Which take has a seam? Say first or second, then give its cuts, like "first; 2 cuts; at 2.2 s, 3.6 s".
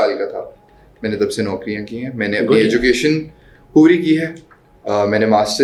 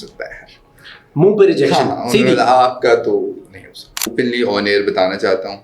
second; 1 cut; at 4.0 s